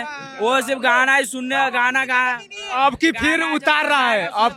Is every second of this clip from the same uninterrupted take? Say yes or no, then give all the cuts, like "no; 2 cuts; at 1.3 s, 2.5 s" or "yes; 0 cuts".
yes; 0 cuts